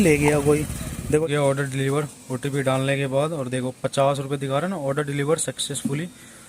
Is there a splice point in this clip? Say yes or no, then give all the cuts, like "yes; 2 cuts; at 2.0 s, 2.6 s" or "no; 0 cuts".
yes; 1 cut; at 1.2 s